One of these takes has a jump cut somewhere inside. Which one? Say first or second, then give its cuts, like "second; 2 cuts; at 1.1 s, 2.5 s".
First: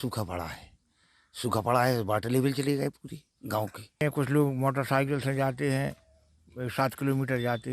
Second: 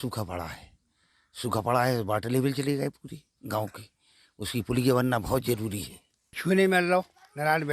first; 1 cut; at 4.0 s